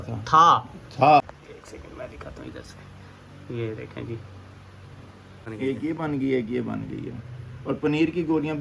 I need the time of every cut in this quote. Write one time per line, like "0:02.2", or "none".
0:01.2
0:05.5